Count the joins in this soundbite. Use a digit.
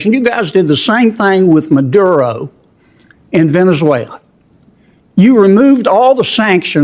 0